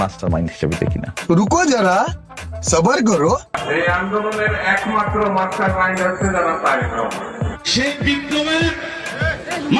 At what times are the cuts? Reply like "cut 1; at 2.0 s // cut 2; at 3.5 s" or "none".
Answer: cut 1; at 7.3 s